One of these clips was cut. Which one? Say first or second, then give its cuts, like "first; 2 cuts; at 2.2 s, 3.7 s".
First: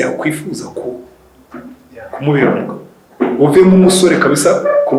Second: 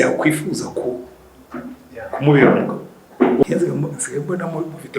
second; 1 cut; at 3.4 s